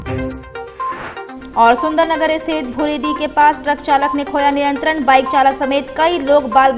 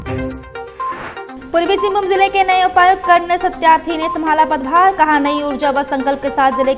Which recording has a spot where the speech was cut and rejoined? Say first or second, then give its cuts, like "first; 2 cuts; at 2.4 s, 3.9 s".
first; 1 cut; at 1.3 s